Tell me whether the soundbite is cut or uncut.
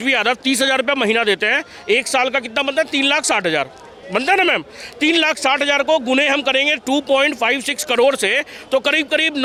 uncut